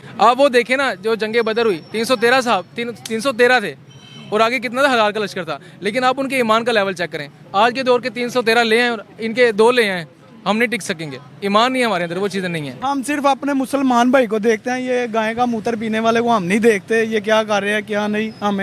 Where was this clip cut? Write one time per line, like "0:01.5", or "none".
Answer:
0:12.6